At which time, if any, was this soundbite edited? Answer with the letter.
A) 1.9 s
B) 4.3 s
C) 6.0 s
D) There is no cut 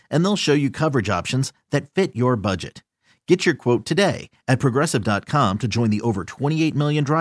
D